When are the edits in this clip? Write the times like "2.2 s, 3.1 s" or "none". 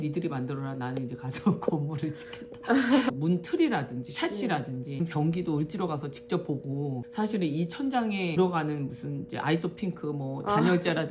3.1 s, 5.0 s, 7.0 s